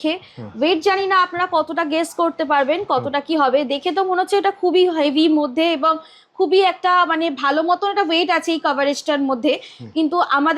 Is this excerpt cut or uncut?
uncut